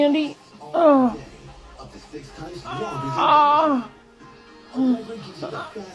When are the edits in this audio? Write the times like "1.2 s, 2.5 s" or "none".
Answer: none